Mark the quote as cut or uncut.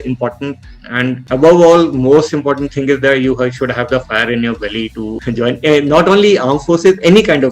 cut